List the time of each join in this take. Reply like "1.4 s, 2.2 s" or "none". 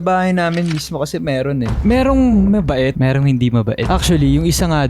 1.8 s

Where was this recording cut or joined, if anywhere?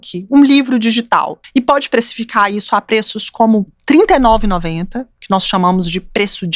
1.4 s

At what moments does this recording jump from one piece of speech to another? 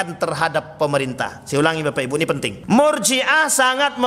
2.5 s

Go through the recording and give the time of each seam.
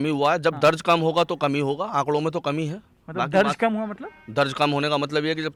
none

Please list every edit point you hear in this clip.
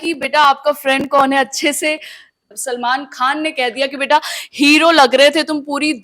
2.5 s

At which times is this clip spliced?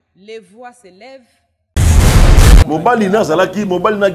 2.7 s

